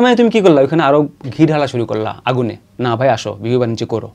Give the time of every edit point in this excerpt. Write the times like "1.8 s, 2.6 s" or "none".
none